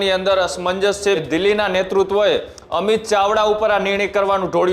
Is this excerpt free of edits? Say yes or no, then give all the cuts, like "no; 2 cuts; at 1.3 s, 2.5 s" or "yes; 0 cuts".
no; 1 cut; at 1.2 s